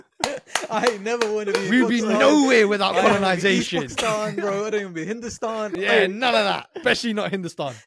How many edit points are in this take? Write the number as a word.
two